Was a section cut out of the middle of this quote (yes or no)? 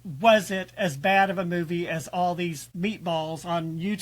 yes